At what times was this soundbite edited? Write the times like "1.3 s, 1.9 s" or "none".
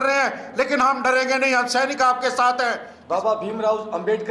2.9 s